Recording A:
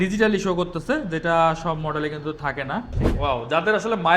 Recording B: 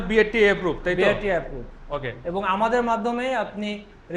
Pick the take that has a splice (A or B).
A